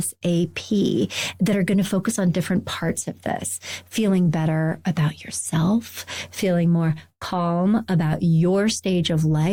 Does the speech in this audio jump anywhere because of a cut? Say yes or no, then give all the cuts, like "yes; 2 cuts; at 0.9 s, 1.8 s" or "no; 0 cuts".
no; 0 cuts